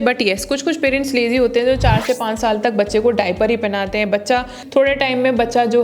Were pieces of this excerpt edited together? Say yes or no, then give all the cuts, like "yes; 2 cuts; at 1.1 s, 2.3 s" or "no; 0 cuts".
yes; 1 cut; at 4.6 s